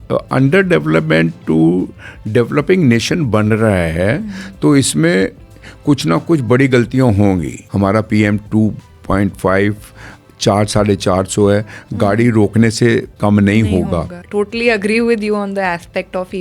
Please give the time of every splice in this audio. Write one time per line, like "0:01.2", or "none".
0:07.6
0:13.1
0:14.2